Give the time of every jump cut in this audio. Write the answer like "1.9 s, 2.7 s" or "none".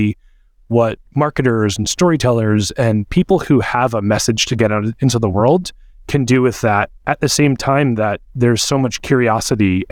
none